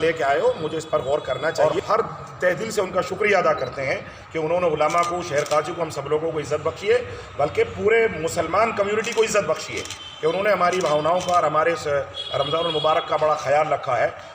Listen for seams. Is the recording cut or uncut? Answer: cut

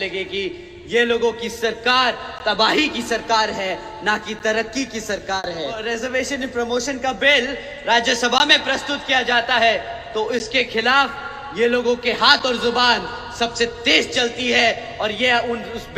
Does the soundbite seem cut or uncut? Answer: cut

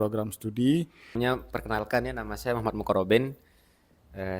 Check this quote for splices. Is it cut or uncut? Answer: cut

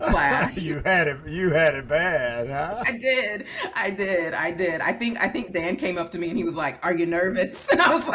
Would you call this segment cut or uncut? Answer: uncut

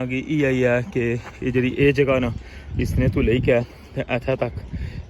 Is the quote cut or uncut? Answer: uncut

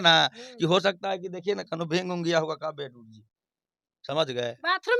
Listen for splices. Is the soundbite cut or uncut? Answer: uncut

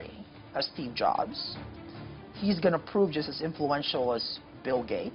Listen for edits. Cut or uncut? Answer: uncut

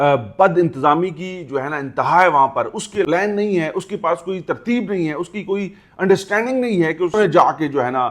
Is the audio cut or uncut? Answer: cut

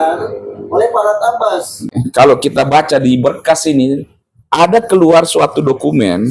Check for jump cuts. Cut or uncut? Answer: cut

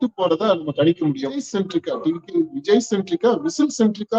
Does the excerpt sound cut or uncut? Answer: cut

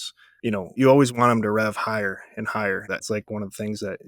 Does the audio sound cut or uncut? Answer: cut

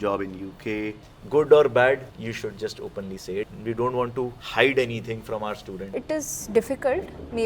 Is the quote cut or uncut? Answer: cut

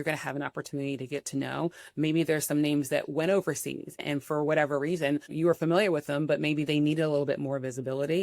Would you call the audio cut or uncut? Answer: cut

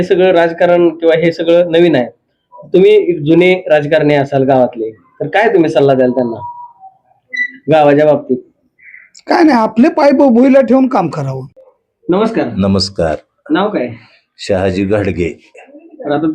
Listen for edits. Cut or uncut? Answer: uncut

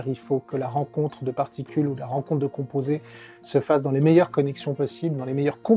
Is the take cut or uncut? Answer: uncut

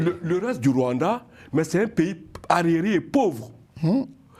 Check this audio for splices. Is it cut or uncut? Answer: uncut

